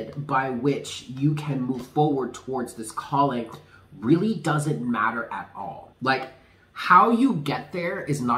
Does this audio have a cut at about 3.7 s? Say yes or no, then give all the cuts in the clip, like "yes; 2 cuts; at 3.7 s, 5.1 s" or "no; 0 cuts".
no; 1 cut; at 5.8 s